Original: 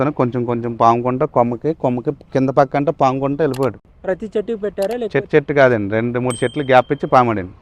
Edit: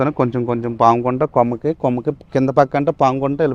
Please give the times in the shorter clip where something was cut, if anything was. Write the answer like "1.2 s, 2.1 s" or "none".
none